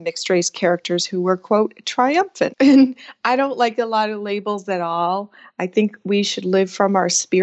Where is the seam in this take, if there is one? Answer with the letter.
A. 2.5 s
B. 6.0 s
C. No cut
A